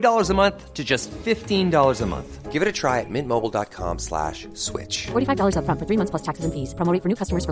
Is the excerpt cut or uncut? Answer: uncut